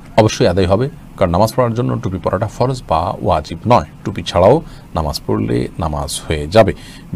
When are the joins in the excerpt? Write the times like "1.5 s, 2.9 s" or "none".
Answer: none